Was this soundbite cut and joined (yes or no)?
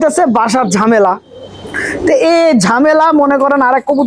no